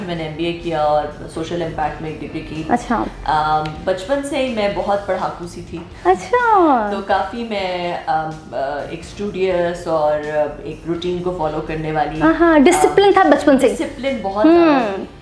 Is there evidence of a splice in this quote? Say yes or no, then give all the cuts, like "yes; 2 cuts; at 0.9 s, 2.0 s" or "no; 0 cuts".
no; 0 cuts